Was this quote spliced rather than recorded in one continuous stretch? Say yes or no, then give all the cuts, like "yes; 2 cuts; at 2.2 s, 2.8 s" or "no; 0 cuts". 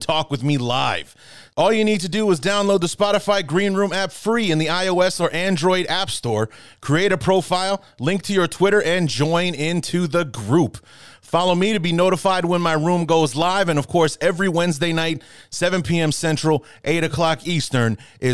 no; 0 cuts